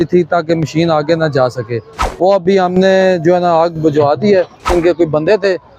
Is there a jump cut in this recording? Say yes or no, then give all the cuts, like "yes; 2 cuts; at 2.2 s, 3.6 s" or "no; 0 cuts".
yes; 1 cut; at 4.7 s